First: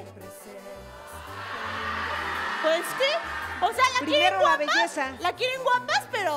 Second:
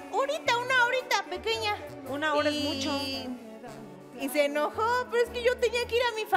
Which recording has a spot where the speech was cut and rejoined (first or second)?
first